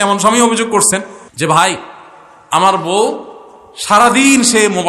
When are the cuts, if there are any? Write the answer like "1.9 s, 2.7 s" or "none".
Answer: 1.2 s